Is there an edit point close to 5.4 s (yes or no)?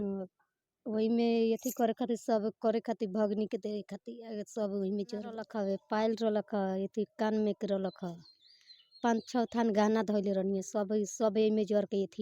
yes